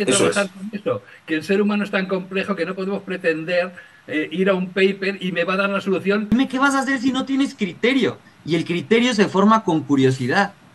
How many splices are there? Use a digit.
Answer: 1